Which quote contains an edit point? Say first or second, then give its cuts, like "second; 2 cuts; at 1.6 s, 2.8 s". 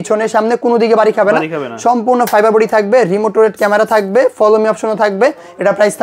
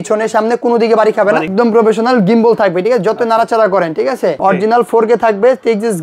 second; 2 cuts; at 1.5 s, 4.4 s